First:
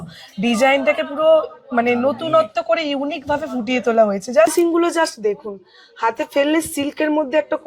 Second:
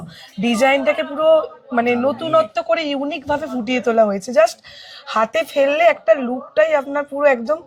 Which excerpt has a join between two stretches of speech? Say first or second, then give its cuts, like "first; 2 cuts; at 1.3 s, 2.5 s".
first; 1 cut; at 4.5 s